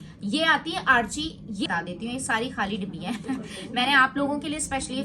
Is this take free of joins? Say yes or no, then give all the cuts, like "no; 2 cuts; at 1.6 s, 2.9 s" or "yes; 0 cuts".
no; 1 cut; at 1.7 s